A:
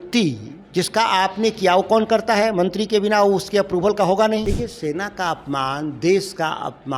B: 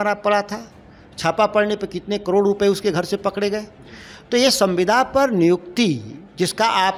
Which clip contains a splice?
A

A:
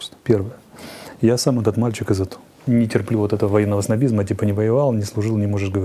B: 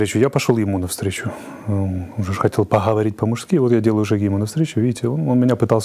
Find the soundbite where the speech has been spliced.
A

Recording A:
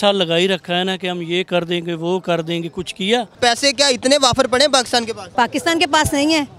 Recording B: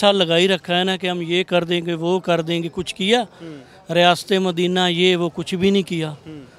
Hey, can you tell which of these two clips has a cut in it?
A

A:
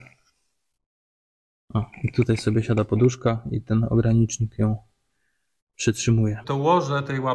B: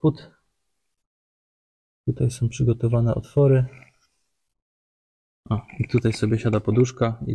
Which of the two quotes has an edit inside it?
A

